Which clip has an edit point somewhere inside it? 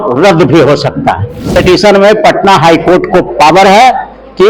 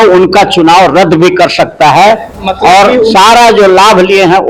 first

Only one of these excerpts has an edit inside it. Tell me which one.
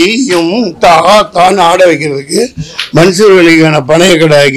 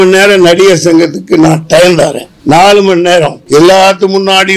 second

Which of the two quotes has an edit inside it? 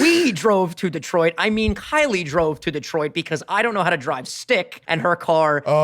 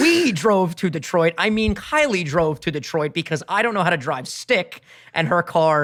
first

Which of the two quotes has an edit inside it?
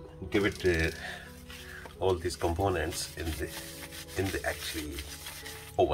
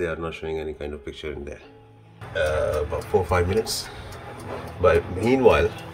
second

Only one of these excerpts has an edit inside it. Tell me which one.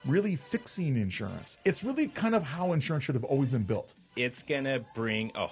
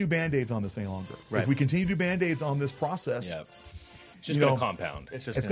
first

